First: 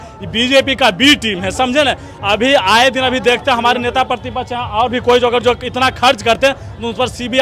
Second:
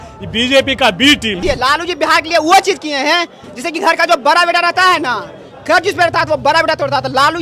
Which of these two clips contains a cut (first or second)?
second